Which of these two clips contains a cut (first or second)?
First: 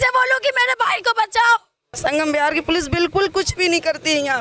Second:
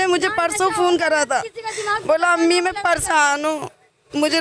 first